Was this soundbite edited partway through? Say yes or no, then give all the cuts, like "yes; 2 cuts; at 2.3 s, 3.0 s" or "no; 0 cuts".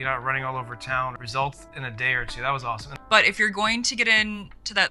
yes; 2 cuts; at 1.2 s, 3.1 s